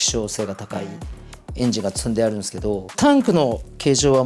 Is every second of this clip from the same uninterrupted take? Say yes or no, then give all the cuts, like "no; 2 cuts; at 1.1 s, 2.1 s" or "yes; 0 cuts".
no; 1 cut; at 2.9 s